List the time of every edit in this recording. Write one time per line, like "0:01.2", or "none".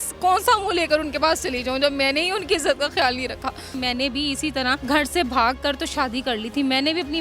0:03.7
0:04.8